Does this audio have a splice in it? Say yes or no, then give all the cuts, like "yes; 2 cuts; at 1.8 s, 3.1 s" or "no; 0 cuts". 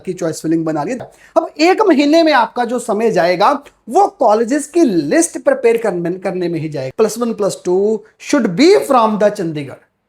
yes; 2 cuts; at 1.0 s, 6.8 s